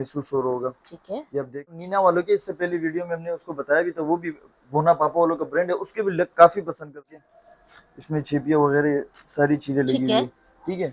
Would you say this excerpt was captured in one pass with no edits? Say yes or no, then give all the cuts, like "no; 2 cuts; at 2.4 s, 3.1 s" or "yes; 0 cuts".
no; 2 cuts; at 1.8 s, 6.9 s